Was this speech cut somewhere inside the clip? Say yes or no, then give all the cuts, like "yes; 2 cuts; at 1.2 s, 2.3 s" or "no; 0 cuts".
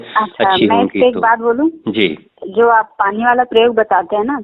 yes; 1 cut; at 2.3 s